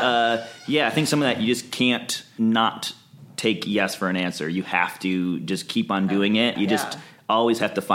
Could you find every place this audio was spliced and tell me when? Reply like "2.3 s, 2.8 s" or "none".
2.3 s, 6.5 s

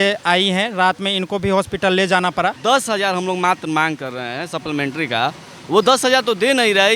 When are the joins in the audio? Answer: 2.6 s

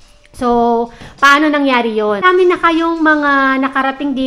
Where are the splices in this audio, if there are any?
2.2 s

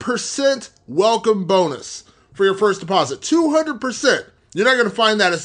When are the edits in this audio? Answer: none

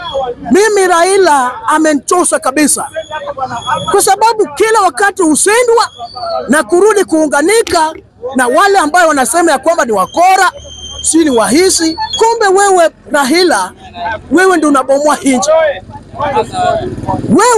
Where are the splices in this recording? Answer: 12.0 s

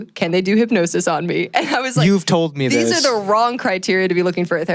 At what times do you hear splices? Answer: none

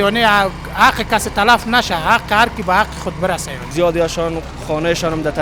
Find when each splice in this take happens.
3.6 s

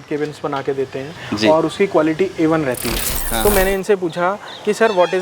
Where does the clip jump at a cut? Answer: 3.1 s

